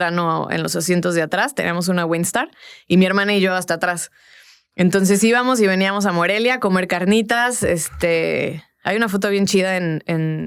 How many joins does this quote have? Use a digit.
0